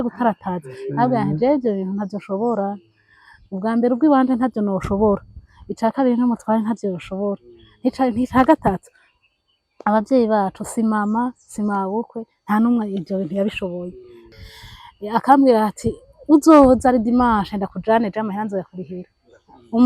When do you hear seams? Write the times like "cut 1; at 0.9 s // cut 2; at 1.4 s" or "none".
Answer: cut 1; at 14.2 s